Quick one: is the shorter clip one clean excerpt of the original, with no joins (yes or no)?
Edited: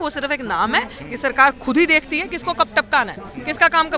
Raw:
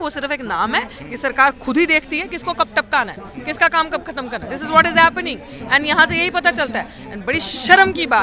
yes